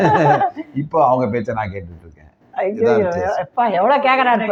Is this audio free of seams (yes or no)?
yes